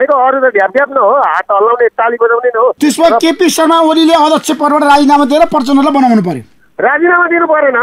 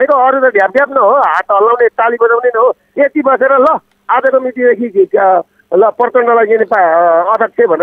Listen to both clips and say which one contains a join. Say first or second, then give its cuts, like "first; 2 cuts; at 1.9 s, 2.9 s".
first; 1 cut; at 2.8 s